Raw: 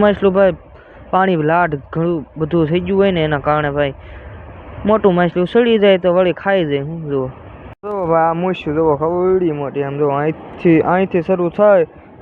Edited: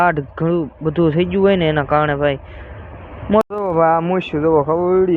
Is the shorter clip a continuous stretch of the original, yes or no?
no